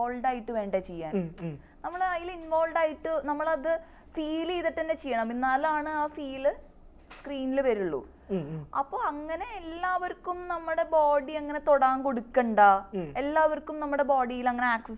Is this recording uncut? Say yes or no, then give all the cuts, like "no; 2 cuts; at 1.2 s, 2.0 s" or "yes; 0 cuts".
yes; 0 cuts